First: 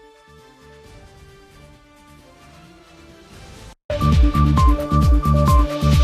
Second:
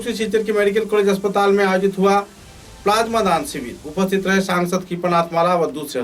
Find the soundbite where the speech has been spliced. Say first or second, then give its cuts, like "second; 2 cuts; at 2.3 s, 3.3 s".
first; 1 cut; at 3.6 s